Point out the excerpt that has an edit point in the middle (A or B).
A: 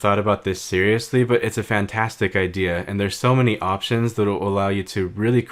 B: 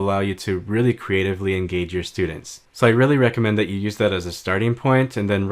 B